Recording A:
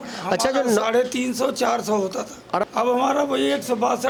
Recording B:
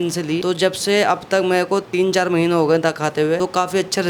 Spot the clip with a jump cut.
B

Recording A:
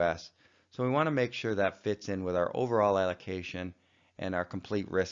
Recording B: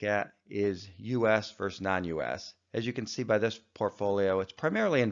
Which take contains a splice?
B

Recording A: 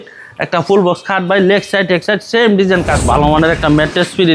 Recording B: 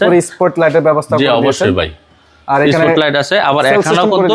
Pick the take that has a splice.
A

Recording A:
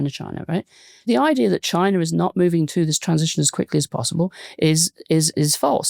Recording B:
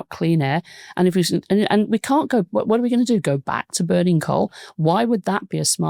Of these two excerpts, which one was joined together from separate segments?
A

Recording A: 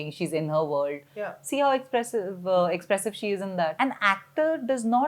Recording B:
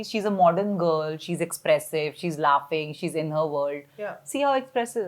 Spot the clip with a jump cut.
A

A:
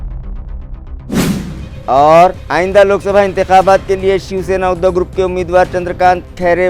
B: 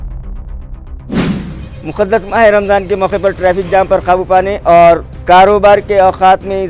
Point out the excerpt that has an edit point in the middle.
A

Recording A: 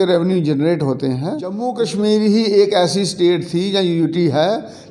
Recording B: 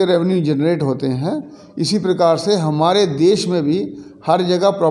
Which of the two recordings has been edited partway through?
A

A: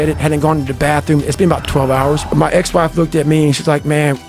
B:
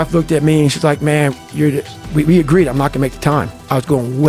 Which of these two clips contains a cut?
A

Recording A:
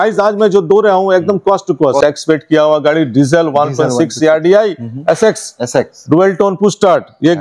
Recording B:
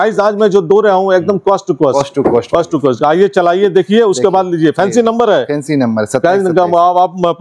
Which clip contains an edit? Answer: A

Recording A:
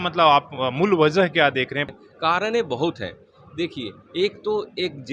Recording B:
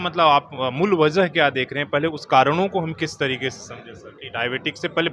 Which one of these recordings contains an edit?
A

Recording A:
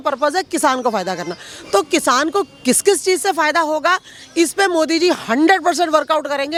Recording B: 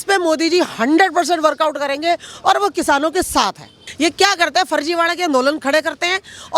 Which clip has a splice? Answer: B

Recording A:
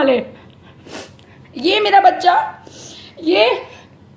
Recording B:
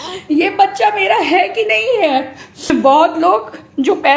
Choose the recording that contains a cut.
B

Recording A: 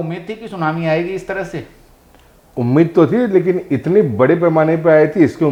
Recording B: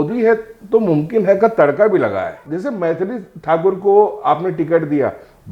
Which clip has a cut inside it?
B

